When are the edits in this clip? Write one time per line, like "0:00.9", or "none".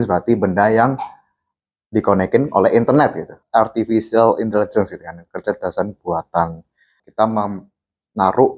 0:03.3
0:07.0